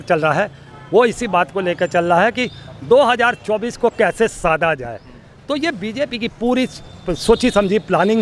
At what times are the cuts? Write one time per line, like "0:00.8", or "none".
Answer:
none

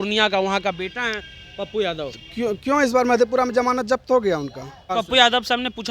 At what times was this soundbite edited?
0:04.9

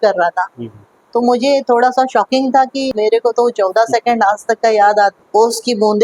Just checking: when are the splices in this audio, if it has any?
0:02.9
0:05.2

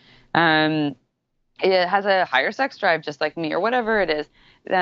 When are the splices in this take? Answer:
none

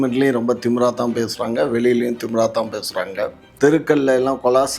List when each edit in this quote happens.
0:03.4

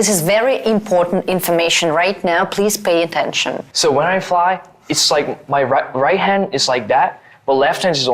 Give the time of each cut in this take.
0:03.6

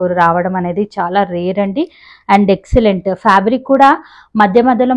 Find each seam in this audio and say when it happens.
none

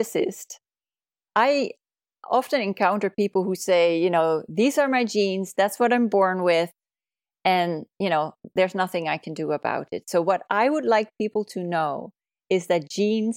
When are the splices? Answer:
0:01.2

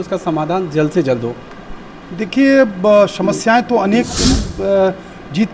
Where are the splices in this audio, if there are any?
0:04.5

